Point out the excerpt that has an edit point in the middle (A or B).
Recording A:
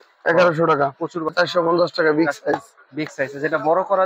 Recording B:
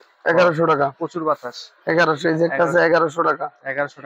A